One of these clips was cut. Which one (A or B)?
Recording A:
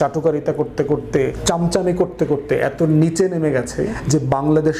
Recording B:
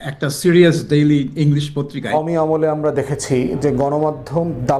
B